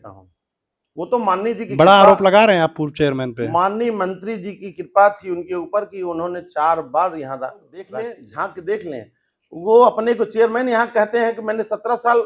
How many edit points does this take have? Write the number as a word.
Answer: one